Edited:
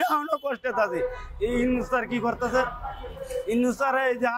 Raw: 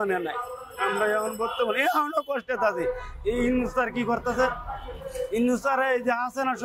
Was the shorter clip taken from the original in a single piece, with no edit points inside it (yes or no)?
yes